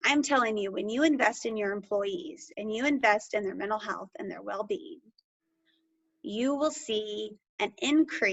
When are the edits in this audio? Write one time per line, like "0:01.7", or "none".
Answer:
none